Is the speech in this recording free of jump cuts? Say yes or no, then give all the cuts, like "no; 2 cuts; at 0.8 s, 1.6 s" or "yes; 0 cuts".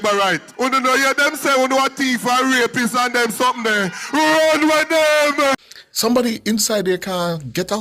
no; 1 cut; at 5.7 s